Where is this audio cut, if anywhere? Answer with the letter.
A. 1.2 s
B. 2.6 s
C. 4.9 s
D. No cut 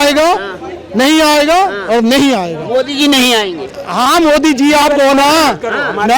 D